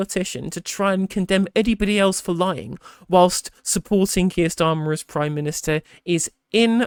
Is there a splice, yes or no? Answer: no